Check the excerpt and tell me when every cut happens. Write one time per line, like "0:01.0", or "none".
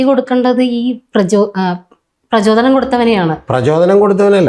none